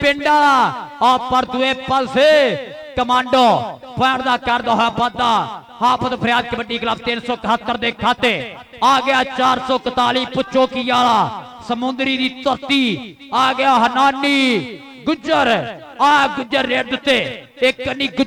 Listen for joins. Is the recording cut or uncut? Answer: uncut